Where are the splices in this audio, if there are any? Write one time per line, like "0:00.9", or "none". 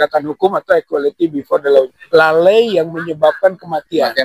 0:02.0

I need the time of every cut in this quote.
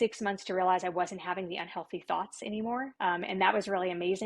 0:02.9

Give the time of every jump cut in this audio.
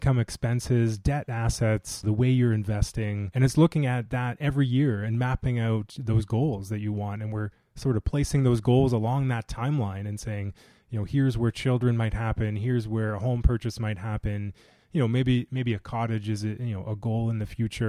0:02.0
0:03.2

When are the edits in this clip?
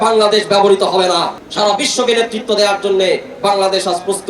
0:01.4

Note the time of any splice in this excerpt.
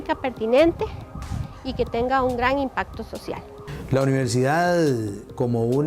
0:03.7

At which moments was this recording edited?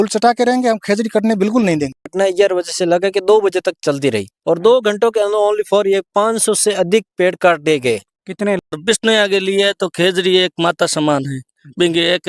0:02.1
0:08.7

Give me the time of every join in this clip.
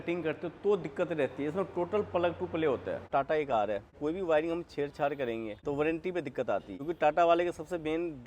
0:03.0
0:04.0
0:05.6
0:06.7

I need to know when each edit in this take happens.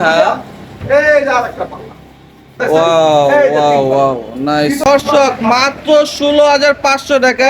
0:04.8

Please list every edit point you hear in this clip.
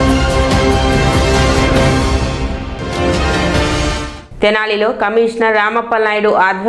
0:04.1

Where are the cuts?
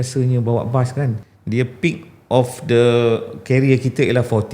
0:01.3

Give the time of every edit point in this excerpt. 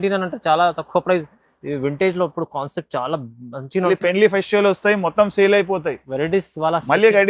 0:03.9

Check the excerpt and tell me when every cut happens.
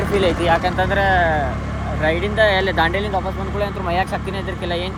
none

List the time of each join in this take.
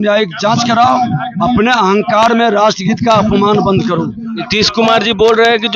0:04.2

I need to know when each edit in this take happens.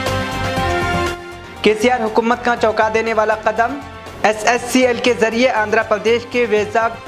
0:01.1

